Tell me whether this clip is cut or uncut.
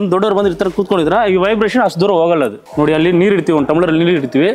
cut